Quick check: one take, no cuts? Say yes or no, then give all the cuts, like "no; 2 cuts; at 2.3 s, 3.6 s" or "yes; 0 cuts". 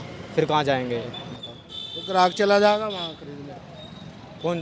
yes; 0 cuts